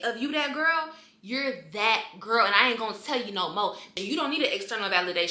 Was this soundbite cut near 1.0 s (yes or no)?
no